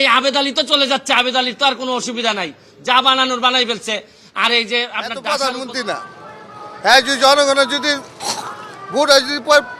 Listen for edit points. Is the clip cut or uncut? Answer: cut